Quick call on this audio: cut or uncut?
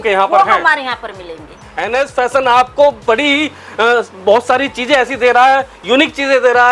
cut